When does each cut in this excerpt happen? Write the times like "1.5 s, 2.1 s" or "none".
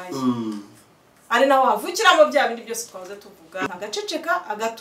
3.7 s